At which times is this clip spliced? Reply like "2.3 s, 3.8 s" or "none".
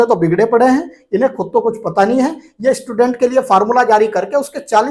none